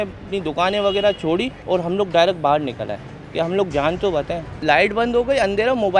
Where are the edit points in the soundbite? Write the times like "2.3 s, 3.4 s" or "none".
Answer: 1.5 s, 4.4 s